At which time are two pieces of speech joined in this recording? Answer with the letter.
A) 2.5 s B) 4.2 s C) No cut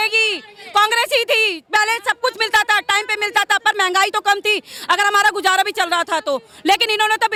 C